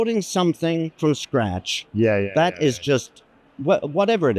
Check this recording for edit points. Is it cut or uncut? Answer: cut